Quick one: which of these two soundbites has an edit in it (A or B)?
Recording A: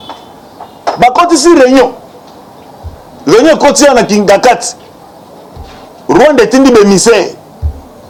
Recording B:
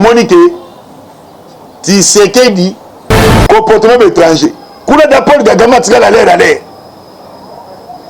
B